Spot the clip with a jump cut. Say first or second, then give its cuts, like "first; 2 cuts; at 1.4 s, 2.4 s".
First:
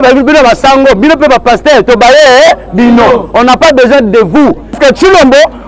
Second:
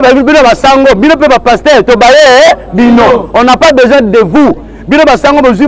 first; 1 cut; at 4.8 s